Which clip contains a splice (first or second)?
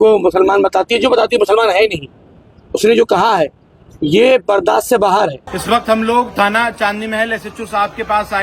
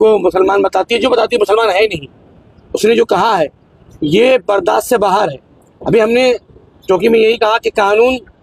first